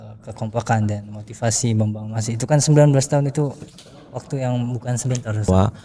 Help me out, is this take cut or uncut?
uncut